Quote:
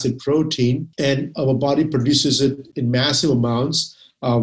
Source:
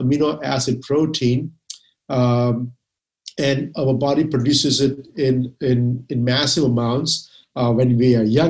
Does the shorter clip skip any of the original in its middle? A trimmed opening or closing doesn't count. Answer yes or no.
yes